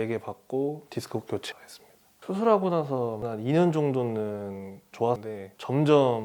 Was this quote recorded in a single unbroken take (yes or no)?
no